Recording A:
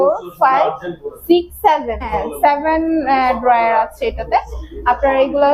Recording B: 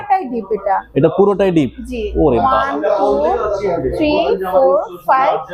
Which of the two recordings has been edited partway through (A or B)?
A